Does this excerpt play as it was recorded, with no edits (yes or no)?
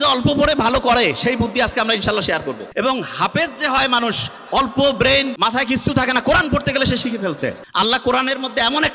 no